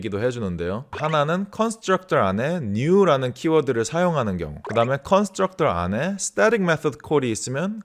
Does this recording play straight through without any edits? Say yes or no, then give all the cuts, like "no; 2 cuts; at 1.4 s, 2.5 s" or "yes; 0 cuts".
no; 2 cuts; at 0.9 s, 4.5 s